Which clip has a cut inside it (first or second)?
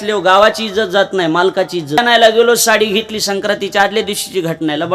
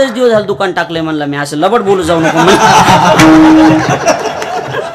first